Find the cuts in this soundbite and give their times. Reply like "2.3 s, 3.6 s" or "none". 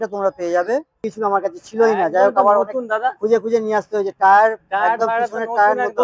1.1 s